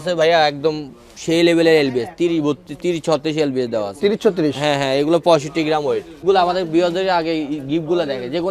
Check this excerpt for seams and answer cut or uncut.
cut